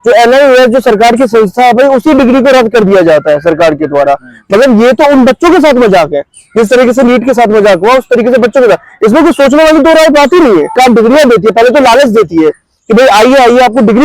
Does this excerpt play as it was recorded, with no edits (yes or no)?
no